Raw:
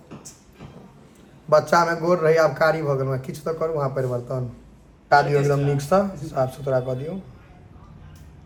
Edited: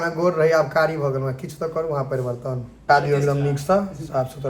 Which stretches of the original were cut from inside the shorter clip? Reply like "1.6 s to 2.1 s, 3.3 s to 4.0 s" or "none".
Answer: 4.5 s to 4.9 s